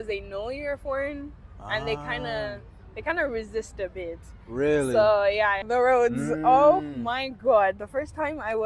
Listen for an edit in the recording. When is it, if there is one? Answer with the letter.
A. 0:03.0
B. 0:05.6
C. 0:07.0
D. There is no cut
B